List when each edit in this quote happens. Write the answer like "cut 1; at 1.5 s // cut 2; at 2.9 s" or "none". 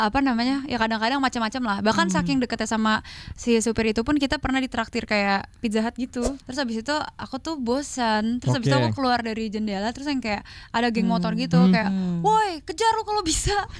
cut 1; at 6.4 s

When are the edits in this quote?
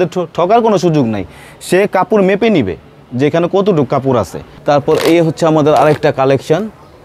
cut 1; at 4.4 s

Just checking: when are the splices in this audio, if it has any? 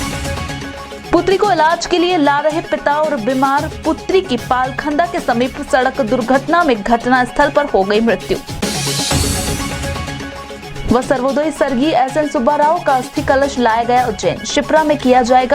cut 1; at 1.0 s

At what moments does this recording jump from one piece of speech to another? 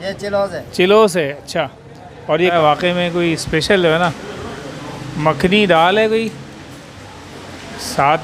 cut 1; at 2.5 s

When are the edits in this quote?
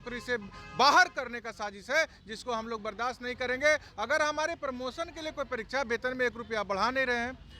none

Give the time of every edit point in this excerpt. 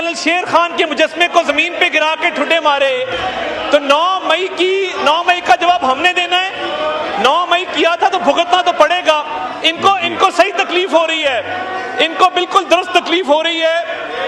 none

